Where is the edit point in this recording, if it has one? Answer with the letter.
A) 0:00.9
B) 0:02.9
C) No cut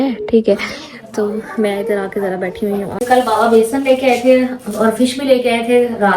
B